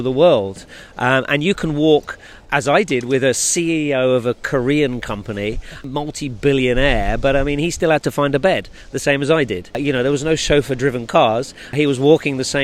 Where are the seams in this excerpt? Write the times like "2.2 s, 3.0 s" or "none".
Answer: 5.7 s, 9.8 s, 11.7 s